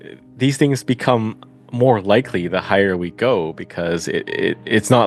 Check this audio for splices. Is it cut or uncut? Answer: uncut